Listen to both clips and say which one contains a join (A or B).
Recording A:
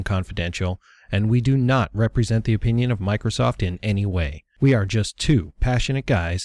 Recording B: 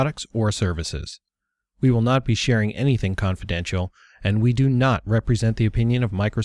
A